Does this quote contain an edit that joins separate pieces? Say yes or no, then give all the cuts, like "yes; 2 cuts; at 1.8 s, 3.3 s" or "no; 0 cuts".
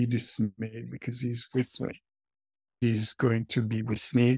yes; 1 cut; at 2.8 s